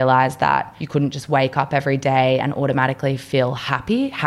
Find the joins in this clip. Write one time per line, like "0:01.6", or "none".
none

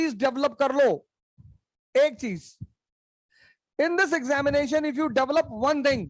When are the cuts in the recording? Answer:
none

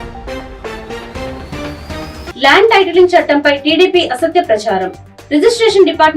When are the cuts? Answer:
0:02.3

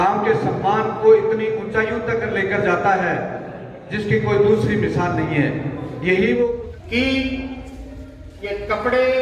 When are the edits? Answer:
0:06.6

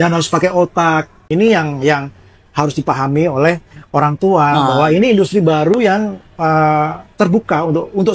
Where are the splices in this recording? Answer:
0:01.2

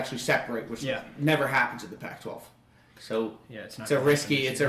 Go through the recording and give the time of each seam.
none

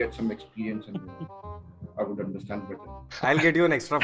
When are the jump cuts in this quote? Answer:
0:03.0

